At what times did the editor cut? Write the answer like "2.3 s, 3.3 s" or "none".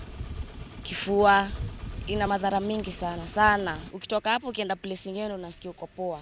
2.3 s